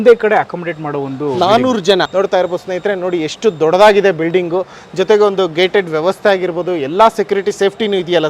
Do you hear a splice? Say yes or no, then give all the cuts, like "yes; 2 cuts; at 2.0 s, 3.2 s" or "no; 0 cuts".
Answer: yes; 1 cut; at 2.1 s